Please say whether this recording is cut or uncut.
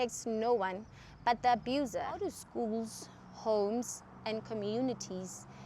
cut